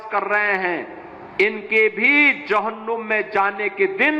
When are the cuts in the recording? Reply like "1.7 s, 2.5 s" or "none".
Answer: none